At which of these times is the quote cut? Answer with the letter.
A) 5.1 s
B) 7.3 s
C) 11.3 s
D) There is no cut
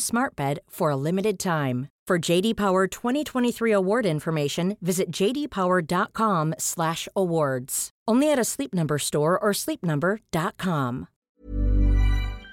C